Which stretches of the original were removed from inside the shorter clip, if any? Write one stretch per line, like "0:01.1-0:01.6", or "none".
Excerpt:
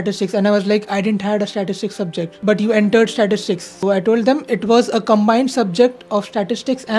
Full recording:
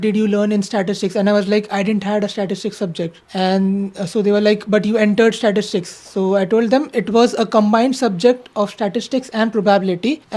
0:03.2-0:04.6
0:06.0-0:06.2